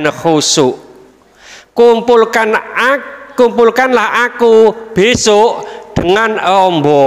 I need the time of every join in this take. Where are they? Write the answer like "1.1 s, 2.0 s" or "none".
none